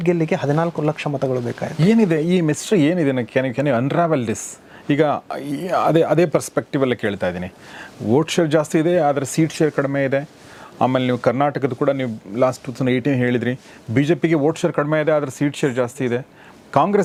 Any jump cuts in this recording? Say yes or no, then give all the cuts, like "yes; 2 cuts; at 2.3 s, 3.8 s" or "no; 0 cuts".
no; 0 cuts